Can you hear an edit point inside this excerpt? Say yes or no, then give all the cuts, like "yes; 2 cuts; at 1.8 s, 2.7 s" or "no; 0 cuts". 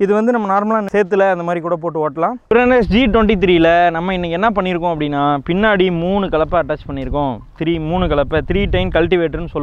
yes; 1 cut; at 2.5 s